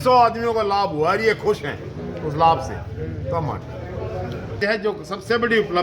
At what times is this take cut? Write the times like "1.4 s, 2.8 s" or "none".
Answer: 4.5 s